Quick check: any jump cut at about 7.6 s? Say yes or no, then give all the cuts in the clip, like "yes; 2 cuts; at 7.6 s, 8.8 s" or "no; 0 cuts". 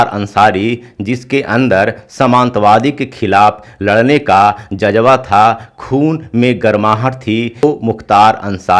yes; 1 cut; at 7.6 s